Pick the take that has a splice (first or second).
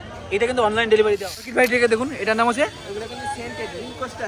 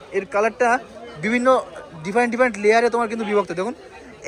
first